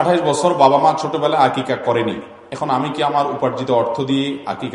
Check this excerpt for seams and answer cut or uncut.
uncut